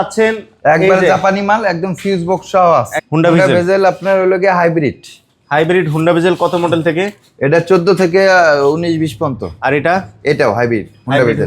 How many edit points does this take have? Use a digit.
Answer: 1